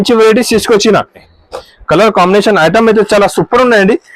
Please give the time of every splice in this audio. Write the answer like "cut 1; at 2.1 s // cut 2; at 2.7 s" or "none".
cut 1; at 1.3 s